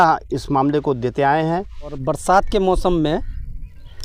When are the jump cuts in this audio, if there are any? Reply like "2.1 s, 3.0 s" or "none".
2.0 s

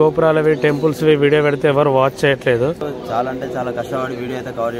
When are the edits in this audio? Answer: 2.9 s

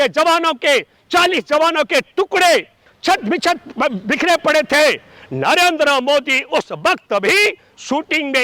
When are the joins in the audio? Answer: none

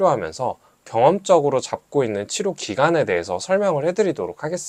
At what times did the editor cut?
none

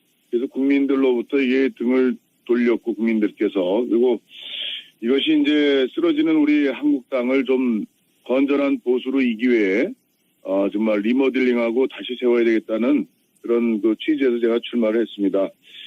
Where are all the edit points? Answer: 13.6 s

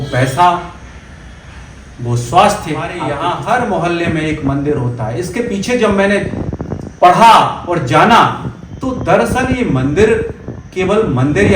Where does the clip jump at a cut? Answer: 3.1 s

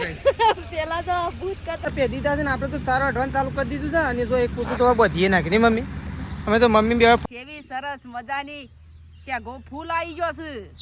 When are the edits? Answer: 1.9 s, 7.2 s

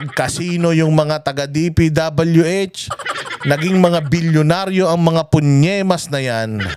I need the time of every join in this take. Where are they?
none

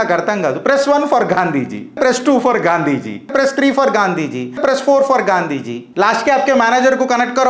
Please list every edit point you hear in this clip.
2.0 s, 3.3 s, 4.6 s, 5.8 s

